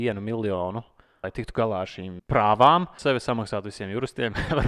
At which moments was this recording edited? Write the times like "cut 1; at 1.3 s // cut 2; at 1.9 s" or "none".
cut 1; at 1.2 s // cut 2; at 2.1 s // cut 3; at 3.0 s